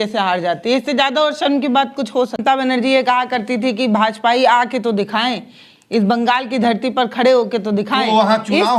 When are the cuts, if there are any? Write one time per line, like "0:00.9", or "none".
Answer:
0:02.4

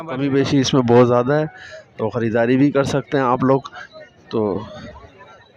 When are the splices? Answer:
none

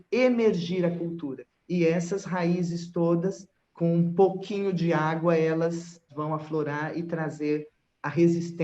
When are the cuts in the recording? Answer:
0:06.1

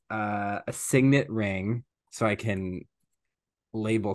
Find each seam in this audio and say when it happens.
0:02.0

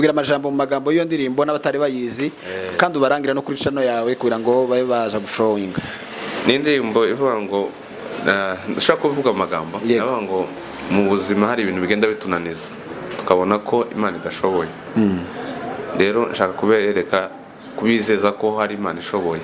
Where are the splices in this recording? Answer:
none

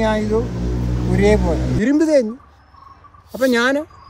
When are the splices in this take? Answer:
0:01.7

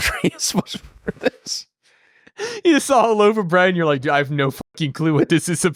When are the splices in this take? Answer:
none

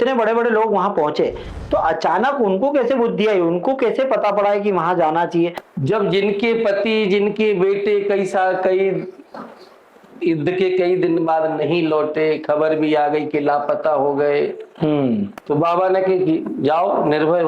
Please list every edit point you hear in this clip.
0:05.6
0:15.4

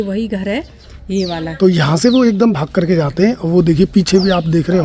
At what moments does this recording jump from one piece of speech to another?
0:01.4

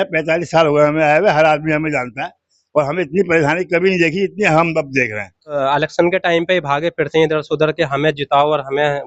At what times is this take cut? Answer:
0:05.5

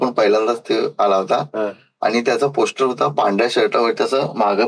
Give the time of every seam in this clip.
none

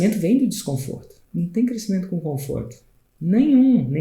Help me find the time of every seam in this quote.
0:01.2

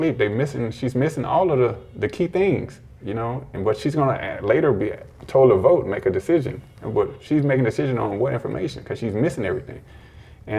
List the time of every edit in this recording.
none

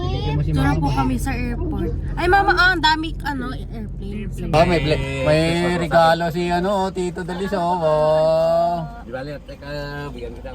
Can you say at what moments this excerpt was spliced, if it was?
0:04.5

